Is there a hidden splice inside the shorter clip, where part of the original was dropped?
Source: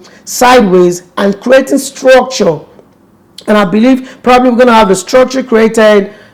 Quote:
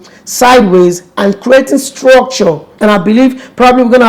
yes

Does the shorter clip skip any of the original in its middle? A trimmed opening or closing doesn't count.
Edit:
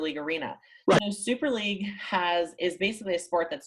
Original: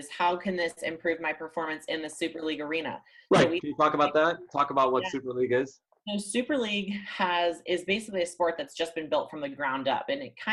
yes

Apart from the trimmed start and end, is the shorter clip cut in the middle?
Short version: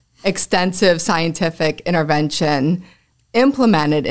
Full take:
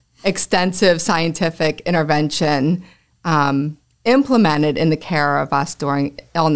yes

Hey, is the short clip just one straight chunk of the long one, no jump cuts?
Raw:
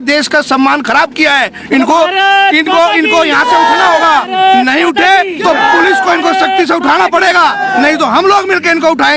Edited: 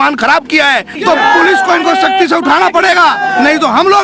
no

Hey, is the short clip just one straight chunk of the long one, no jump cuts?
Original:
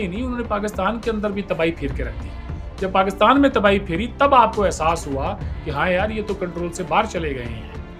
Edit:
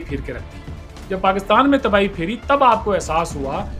yes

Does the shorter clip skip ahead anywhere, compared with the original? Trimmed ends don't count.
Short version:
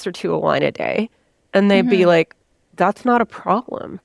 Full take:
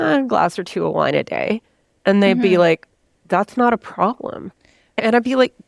no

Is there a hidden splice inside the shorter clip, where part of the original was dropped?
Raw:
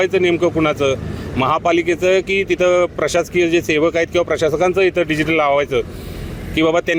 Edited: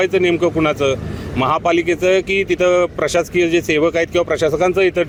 no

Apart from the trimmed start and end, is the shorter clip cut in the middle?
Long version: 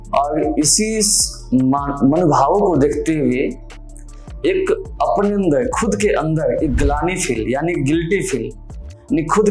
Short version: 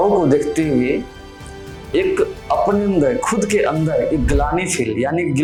no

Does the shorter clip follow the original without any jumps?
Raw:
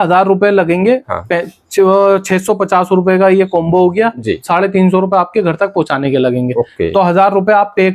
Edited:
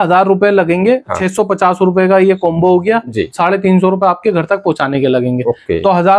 no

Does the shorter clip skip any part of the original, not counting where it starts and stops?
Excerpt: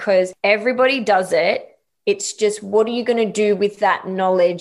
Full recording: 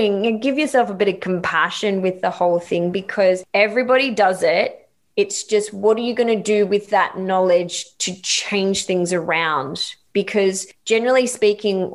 no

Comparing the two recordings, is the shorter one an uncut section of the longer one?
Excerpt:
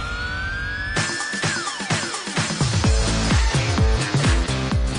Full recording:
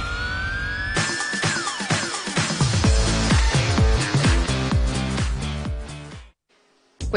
yes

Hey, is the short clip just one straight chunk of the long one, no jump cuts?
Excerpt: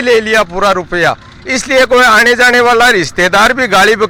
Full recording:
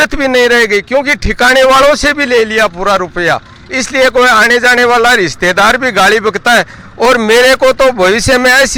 yes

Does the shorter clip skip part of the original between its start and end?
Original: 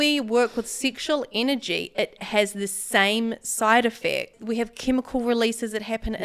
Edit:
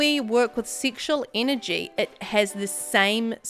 no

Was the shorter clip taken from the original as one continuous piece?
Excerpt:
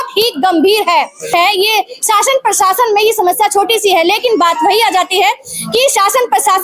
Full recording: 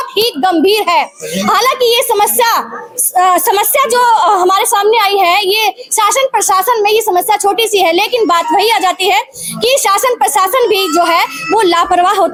no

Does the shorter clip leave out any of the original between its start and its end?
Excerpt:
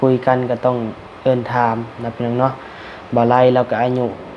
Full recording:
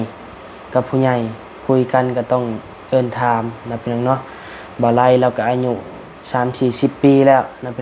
no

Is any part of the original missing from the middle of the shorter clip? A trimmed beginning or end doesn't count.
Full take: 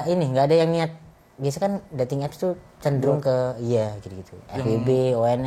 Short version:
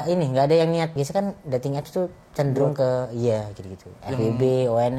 yes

